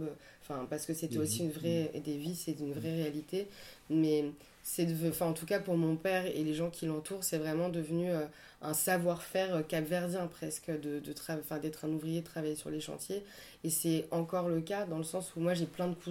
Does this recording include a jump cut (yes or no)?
no